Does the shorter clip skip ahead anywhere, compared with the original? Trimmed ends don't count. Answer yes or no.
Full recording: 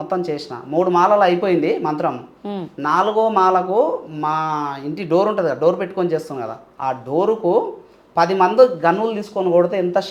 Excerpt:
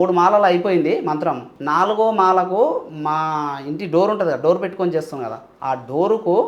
yes